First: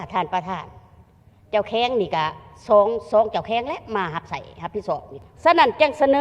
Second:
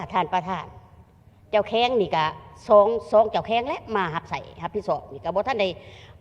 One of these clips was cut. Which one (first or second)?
first